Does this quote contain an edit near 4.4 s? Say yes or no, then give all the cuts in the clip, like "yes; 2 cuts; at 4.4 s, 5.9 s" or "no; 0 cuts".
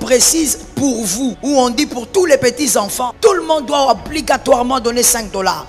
no; 2 cuts; at 1.4 s, 3.0 s